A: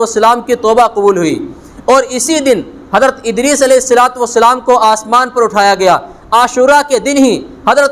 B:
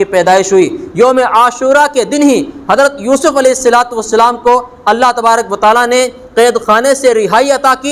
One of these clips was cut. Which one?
A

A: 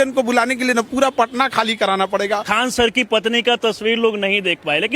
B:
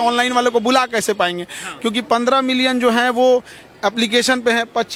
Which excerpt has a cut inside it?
A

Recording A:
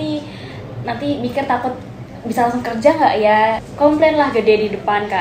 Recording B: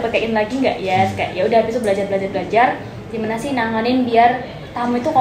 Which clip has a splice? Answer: A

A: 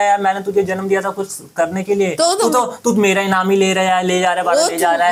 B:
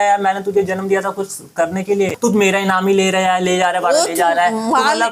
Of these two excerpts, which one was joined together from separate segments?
B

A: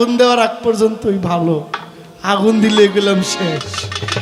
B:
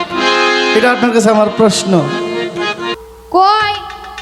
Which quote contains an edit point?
B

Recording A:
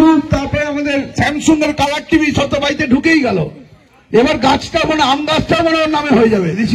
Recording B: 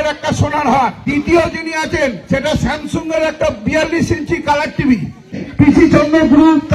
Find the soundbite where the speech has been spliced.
B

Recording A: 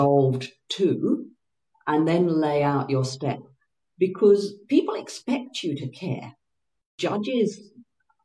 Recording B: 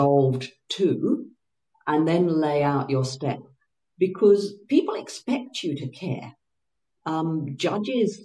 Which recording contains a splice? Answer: A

